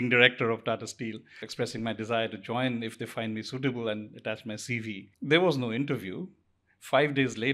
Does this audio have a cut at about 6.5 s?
no; 2 cuts; at 1.4 s, 5.1 s

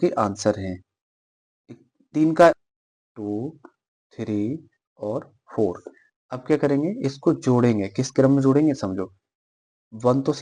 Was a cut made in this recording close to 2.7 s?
yes; 1 cut; at 2.7 s

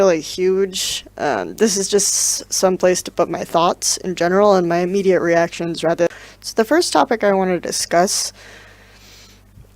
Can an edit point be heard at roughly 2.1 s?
yes; 1 cut; at 2.1 s

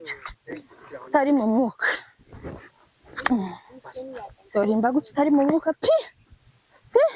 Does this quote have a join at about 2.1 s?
no; 0 cuts

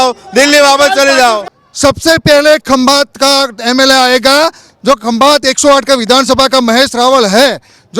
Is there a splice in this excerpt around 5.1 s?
no; 1 cut; at 1.5 s

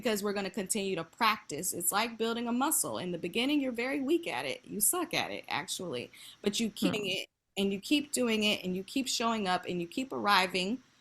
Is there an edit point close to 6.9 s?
yes; 1 cut; at 6.9 s

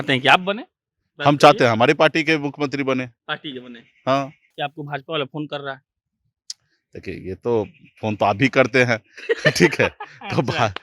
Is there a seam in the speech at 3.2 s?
no; 1 cut; at 4.6 s

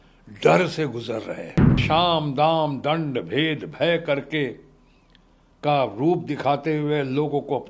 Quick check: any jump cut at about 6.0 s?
no; 1 cut; at 1.8 s

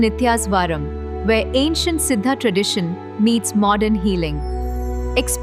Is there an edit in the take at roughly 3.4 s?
no; 0 cuts

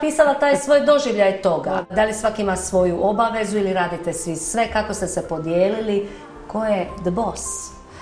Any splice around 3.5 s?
no; 1 cut; at 1.9 s

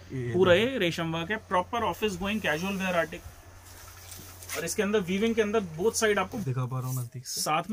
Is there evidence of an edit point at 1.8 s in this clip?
no; 2 cuts; at 3.1 s, 6.4 s

